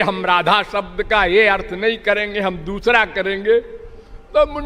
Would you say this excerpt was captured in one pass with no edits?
yes; 0 cuts

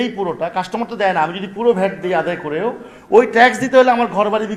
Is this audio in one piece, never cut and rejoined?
yes; 0 cuts

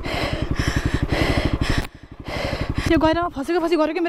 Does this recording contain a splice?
yes; 1 cut; at 2.8 s

